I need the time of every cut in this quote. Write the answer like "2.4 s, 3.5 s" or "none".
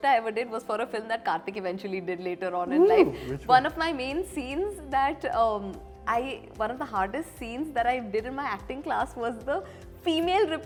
none